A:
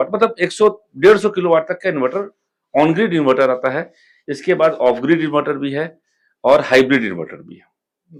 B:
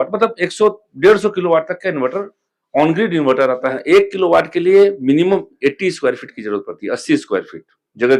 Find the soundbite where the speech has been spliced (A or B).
B